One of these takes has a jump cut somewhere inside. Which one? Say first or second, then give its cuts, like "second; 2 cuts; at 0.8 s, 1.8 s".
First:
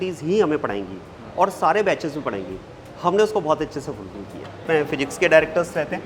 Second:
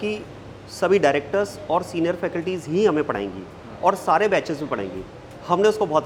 first; 1 cut; at 4.6 s